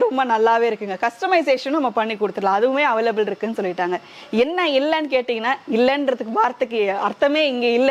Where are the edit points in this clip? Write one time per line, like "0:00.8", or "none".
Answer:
none